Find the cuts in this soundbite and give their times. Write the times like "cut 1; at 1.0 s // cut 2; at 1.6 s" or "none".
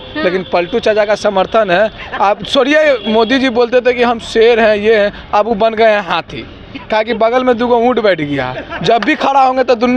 none